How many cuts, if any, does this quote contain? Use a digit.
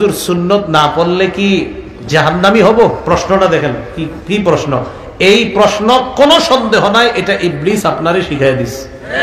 0